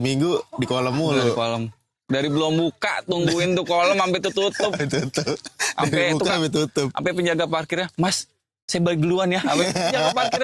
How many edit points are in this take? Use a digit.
0